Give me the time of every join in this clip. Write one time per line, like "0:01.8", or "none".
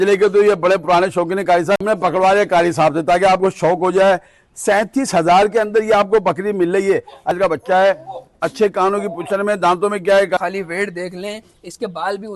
0:01.9
0:07.4
0:10.4